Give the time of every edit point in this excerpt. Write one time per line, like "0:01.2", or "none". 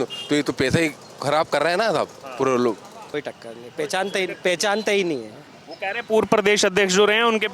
0:03.1